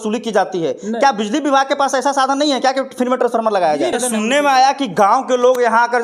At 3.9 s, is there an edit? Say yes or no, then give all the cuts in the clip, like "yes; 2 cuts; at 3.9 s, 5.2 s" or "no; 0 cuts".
yes; 1 cut; at 3.9 s